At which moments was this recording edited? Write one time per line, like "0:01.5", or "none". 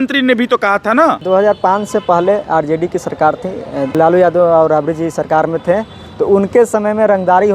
0:01.2
0:03.9

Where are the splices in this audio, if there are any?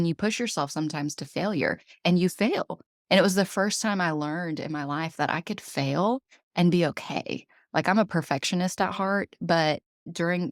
none

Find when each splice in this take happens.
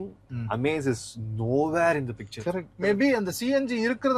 0:02.7

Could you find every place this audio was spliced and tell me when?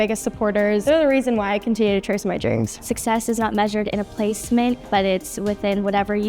0:00.8
0:02.8
0:04.8

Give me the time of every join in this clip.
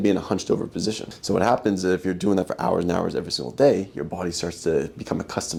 none

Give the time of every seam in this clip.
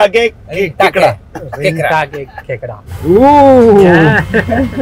0:03.0

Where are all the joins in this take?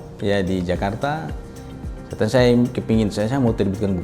none

